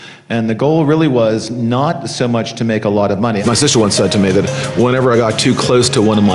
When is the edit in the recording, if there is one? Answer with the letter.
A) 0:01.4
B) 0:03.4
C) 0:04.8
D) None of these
B